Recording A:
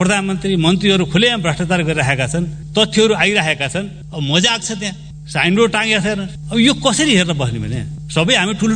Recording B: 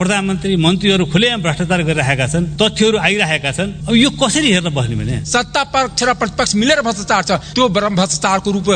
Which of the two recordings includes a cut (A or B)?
B